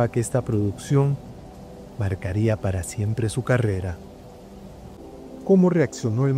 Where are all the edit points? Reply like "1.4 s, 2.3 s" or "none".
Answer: 5.0 s